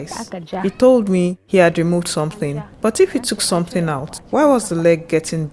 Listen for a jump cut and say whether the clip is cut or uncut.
uncut